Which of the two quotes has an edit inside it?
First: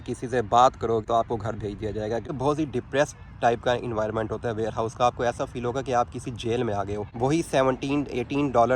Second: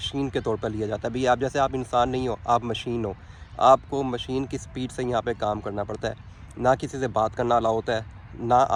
first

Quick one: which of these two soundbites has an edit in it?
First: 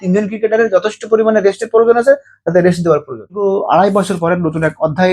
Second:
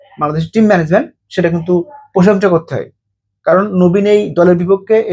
first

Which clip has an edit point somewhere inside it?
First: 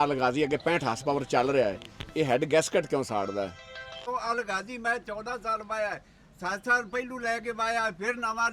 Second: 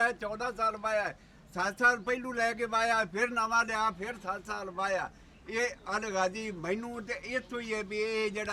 first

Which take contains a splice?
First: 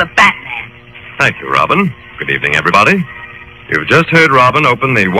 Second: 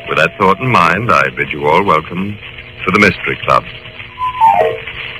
first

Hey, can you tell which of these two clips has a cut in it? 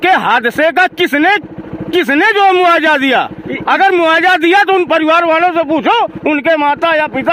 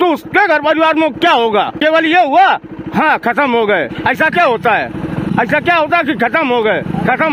second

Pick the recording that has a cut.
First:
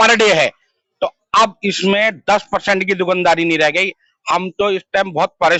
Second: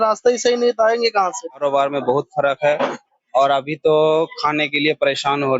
second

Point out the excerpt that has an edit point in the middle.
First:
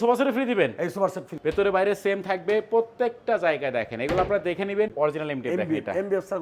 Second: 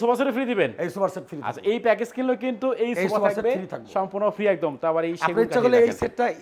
first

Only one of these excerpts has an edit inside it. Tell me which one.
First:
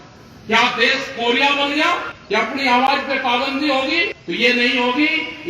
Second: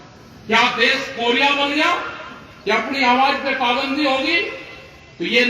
first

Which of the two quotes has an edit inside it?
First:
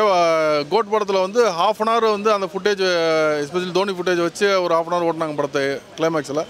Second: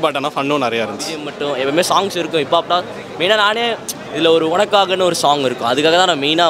second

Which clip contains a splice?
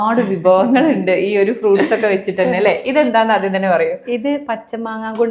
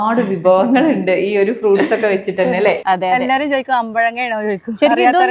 second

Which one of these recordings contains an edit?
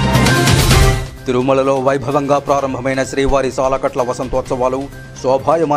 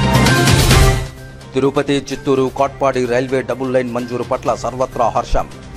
first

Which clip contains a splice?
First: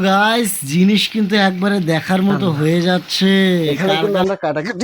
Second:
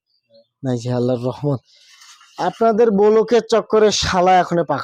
first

